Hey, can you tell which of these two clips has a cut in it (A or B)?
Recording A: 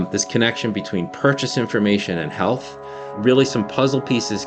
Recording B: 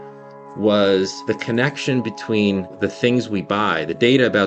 B